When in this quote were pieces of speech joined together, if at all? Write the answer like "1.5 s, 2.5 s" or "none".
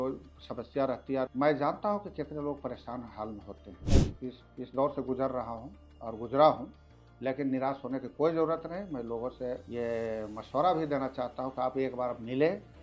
1.3 s, 3.8 s, 9.6 s